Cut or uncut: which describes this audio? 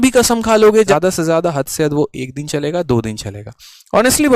cut